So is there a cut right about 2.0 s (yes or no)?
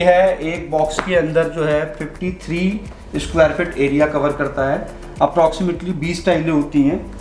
no